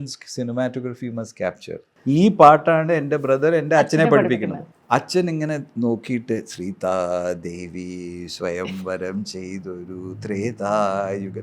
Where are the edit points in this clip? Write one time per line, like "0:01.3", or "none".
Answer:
0:01.9
0:04.7